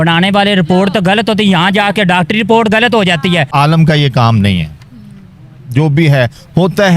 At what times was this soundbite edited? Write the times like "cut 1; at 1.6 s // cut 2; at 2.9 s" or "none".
cut 1; at 3.5 s